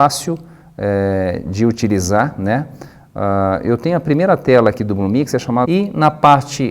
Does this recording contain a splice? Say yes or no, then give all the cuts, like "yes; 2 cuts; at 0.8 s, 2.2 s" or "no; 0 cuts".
no; 0 cuts